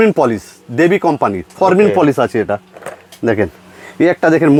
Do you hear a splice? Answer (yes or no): no